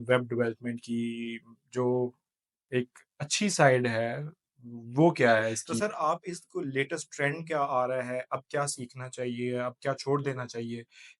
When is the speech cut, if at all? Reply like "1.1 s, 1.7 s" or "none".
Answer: 5.8 s